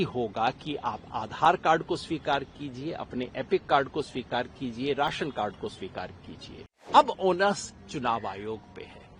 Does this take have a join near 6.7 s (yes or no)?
yes